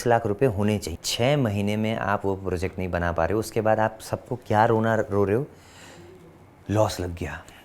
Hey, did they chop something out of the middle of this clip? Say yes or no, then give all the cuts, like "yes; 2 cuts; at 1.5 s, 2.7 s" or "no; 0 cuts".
yes; 1 cut; at 1.0 s